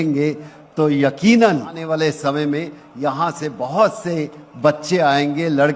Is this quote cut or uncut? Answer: cut